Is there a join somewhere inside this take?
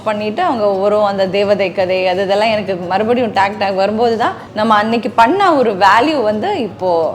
yes; 1 cut; at 4.4 s

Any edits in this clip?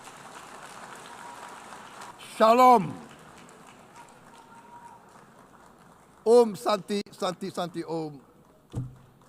yes; 1 cut; at 2.1 s

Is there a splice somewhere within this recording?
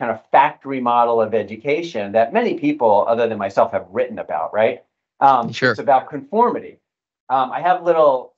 no; 0 cuts

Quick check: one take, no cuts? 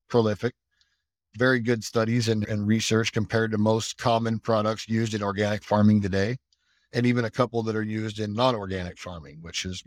yes; 0 cuts

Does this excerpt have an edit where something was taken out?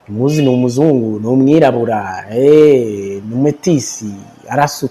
no; 0 cuts

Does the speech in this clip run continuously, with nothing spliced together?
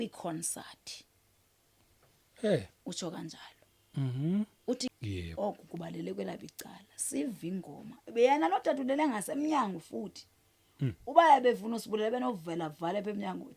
no; 1 cut; at 4.9 s

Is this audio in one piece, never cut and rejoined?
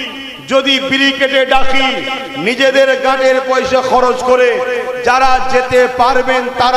yes; 0 cuts

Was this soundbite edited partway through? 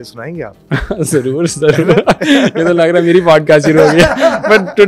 no; 0 cuts

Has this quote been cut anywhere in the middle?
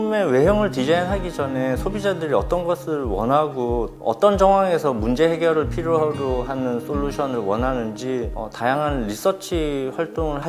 no; 0 cuts

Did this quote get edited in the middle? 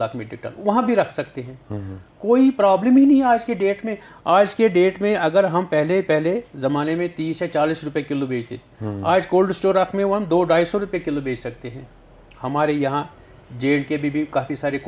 no; 0 cuts

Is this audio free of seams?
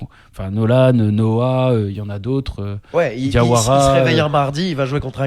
yes; 0 cuts

